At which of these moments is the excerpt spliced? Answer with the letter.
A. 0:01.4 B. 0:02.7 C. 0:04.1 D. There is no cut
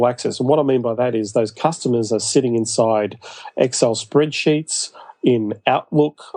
D